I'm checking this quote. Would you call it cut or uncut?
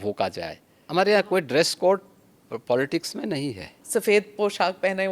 cut